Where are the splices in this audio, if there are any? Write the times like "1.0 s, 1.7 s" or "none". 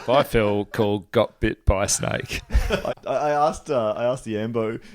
2.8 s